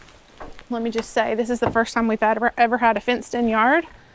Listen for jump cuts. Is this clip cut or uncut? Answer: uncut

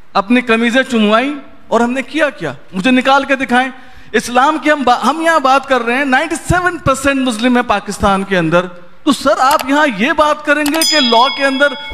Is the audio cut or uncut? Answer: uncut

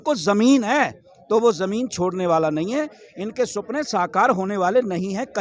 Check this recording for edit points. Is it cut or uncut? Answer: uncut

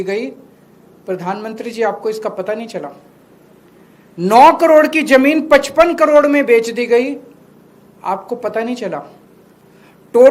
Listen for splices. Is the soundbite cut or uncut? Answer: uncut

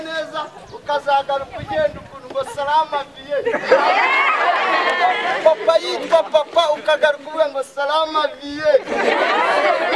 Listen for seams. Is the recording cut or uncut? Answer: uncut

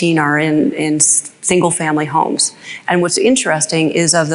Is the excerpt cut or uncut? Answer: uncut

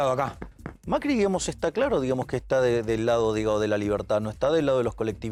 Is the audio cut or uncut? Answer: uncut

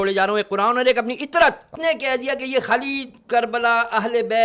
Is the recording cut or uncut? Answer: cut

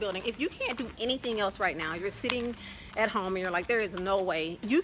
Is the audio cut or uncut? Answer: uncut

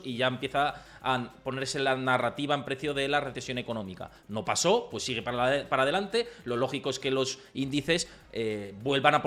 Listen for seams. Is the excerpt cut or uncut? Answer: uncut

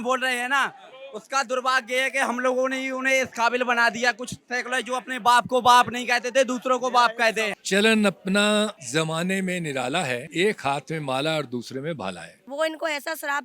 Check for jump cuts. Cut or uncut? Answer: cut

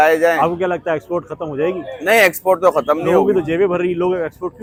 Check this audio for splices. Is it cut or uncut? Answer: uncut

